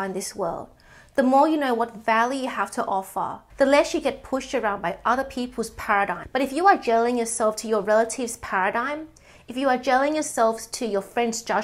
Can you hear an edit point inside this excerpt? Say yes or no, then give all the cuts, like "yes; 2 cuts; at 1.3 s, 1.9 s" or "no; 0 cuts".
yes; 1 cut; at 6.2 s